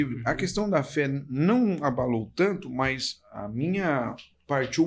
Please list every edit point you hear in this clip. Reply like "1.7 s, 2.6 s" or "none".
none